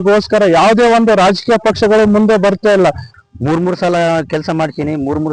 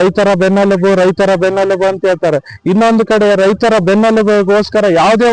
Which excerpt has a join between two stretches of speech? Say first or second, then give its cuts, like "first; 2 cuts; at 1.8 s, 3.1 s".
first; 1 cut; at 3.1 s